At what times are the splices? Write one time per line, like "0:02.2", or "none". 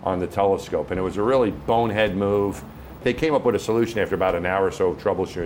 0:03.0